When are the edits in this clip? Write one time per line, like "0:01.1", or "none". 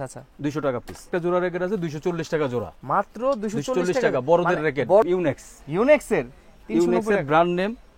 0:01.1
0:05.0